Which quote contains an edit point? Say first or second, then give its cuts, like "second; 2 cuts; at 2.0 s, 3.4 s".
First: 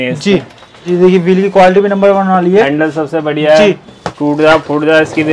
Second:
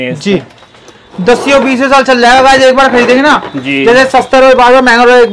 first; 2 cuts; at 0.8 s, 3.9 s